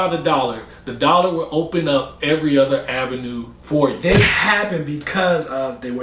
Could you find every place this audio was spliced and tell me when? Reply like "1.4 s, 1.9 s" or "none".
4.1 s